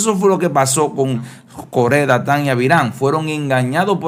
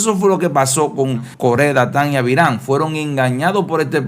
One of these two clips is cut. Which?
second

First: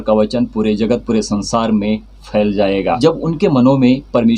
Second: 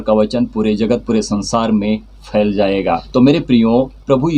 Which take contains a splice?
first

